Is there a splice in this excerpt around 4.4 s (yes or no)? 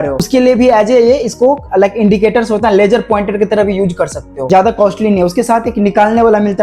yes